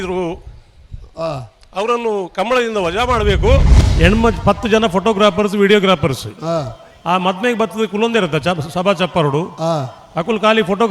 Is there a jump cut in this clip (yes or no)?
yes